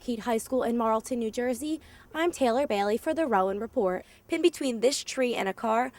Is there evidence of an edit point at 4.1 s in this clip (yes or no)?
yes